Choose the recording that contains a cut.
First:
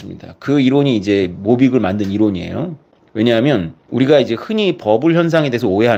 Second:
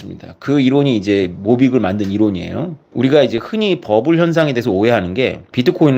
second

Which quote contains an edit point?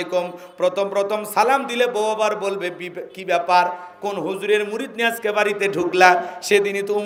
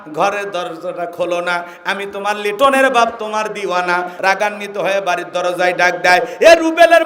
second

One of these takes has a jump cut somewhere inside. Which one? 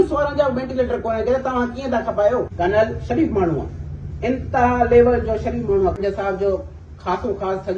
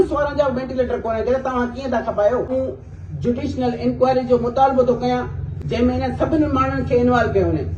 first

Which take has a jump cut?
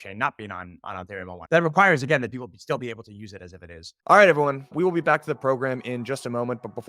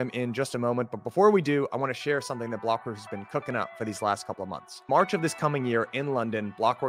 first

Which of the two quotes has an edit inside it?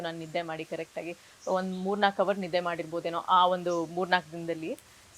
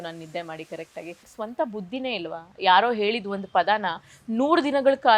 second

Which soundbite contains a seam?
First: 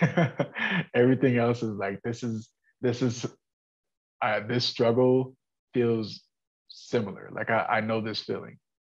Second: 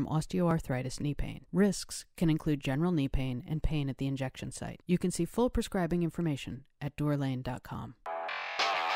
second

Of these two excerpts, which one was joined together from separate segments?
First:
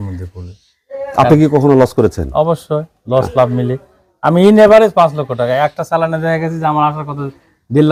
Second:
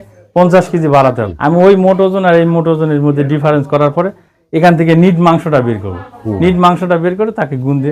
second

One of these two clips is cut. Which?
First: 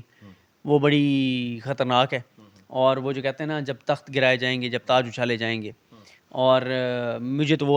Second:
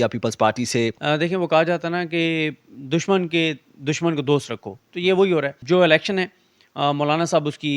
second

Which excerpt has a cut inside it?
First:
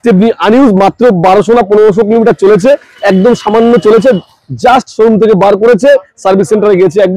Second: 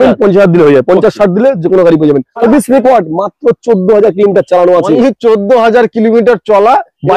second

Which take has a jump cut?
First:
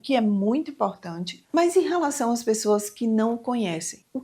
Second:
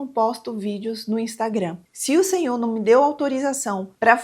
second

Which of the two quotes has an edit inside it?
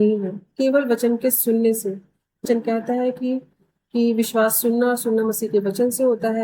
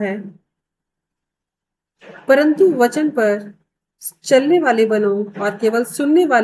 first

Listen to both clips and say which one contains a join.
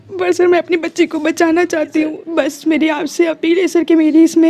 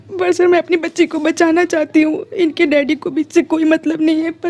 first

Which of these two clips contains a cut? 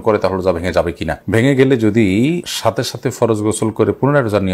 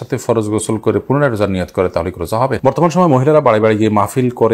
second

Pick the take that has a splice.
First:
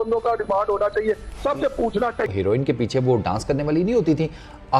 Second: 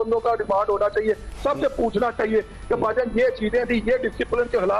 first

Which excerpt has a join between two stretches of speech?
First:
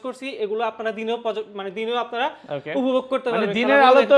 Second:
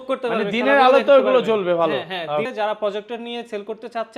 second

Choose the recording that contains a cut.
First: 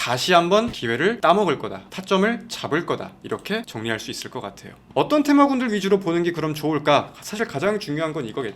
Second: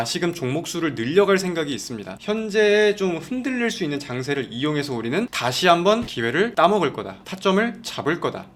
first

